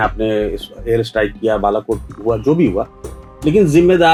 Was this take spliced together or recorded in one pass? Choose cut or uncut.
uncut